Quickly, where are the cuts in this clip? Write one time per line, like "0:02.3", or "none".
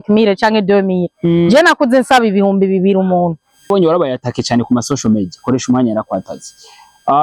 0:03.7